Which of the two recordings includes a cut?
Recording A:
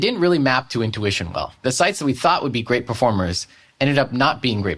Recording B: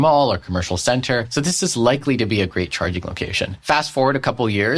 B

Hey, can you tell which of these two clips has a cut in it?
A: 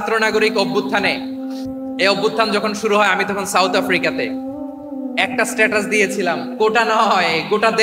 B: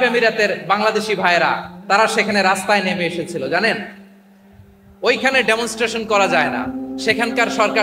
A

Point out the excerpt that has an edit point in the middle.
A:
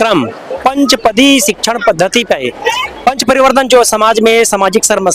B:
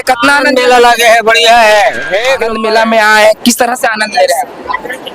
B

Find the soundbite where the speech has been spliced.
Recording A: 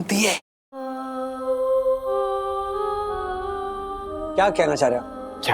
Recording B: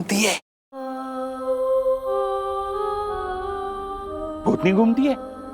A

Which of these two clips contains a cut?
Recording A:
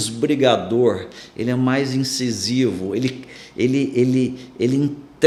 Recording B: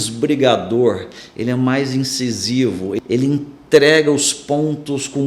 B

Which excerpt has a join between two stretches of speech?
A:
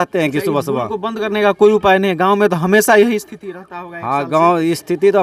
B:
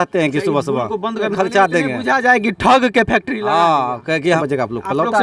B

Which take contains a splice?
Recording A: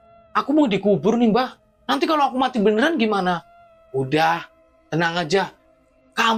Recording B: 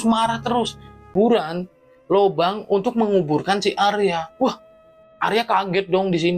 B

